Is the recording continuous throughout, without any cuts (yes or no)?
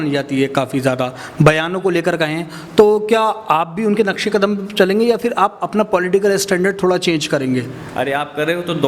no